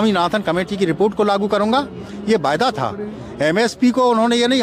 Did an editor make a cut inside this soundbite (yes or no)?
no